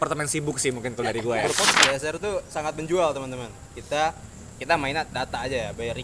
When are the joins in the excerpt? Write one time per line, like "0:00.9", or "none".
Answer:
0:01.7